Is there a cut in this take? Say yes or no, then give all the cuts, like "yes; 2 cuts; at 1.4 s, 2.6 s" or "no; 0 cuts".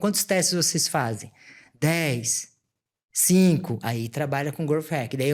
no; 0 cuts